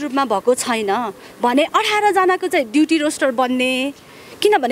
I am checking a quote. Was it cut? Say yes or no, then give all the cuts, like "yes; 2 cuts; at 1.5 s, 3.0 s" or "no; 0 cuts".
no; 0 cuts